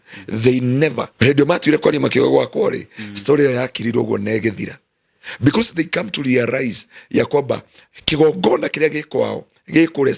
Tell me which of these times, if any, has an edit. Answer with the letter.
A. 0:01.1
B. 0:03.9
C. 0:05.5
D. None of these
A